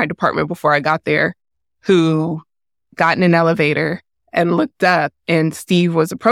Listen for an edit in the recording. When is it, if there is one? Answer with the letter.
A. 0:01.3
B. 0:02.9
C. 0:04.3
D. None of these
B